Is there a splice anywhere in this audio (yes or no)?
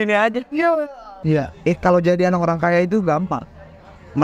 yes